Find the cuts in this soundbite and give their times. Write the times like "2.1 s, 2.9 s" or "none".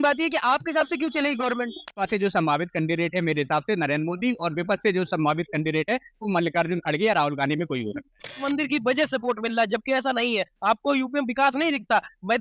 2.0 s, 8.4 s